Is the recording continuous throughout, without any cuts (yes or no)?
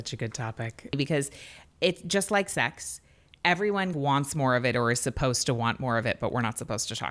no